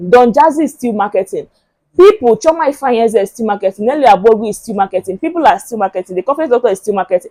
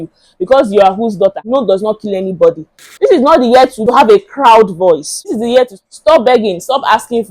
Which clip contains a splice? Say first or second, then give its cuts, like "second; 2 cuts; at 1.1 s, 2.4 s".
second; 4 cuts; at 1.4 s, 2.8 s, 3.8 s, 5.2 s